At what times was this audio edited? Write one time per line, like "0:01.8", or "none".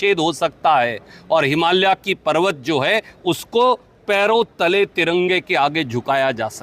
none